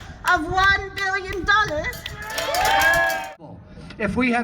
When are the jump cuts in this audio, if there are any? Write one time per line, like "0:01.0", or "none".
0:03.2